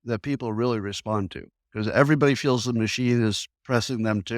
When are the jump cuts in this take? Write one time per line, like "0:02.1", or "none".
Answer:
none